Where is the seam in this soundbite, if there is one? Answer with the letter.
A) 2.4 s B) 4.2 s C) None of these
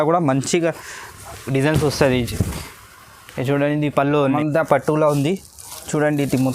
B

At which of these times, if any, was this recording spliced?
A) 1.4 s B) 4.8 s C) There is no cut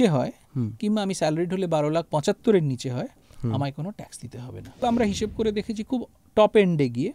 B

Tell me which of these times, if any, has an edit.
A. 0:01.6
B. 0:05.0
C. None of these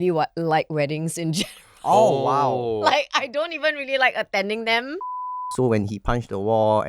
B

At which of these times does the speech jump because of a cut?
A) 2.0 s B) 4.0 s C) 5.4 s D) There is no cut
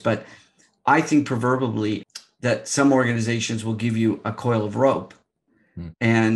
A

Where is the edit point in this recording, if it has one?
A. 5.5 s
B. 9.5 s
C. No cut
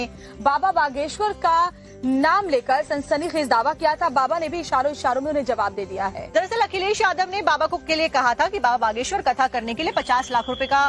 A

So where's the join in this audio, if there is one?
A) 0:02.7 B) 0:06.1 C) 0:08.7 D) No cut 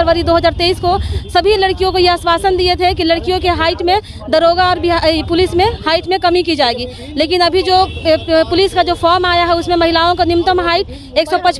D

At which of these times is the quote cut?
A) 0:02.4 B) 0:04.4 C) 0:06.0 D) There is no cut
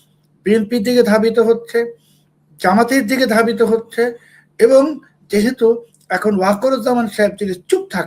D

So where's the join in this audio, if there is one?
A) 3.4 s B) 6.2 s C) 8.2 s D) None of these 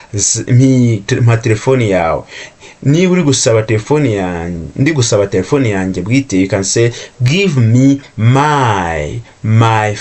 D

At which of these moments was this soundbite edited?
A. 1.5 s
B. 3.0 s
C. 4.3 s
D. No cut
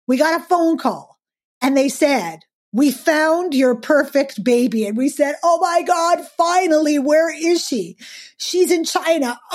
D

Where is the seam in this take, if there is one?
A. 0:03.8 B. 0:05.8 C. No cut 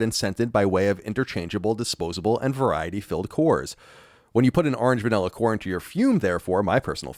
C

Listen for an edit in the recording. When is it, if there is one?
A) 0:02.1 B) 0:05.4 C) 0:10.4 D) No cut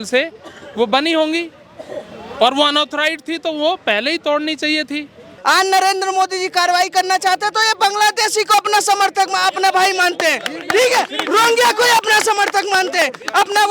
B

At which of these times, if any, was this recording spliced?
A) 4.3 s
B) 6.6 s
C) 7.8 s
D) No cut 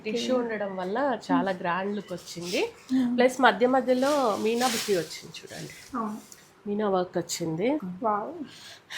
C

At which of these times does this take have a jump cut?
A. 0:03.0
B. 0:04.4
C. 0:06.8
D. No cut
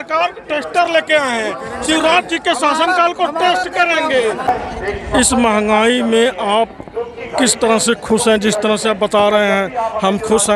B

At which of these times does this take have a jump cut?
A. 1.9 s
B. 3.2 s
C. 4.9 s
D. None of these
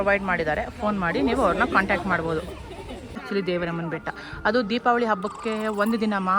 B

